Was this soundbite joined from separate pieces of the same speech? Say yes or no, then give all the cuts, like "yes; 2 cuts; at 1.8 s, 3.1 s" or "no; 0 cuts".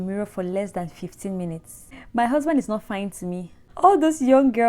yes; 2 cuts; at 1.9 s, 3.6 s